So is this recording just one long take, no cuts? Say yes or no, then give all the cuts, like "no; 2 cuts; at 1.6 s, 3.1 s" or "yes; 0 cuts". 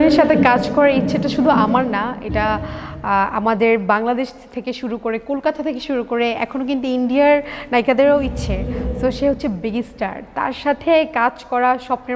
yes; 0 cuts